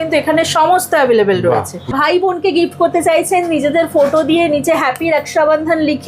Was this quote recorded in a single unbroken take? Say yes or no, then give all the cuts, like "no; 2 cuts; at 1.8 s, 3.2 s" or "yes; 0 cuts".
no; 1 cut; at 1.9 s